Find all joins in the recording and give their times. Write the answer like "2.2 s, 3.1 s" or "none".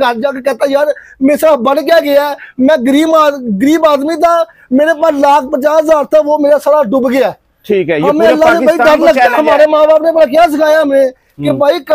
none